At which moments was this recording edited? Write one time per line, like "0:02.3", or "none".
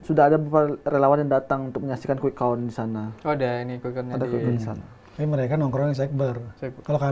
none